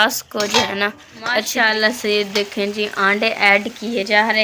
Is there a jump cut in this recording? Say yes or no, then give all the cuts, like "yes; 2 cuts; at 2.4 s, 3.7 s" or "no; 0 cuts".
yes; 1 cut; at 1.5 s